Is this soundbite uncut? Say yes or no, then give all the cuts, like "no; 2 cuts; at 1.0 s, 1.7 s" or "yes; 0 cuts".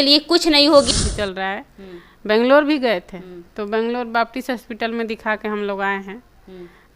no; 1 cut; at 0.9 s